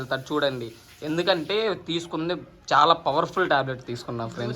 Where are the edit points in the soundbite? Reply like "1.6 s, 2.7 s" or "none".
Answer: none